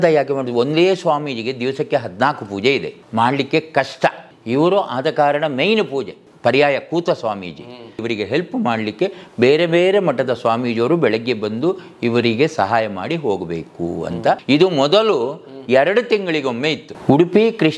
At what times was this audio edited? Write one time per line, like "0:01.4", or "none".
0:03.0
0:04.3
0:06.2
0:08.0
0:14.4
0:16.9